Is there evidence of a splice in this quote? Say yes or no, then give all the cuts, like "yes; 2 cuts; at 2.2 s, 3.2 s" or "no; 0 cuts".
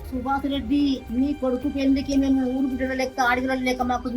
yes; 1 cut; at 1.0 s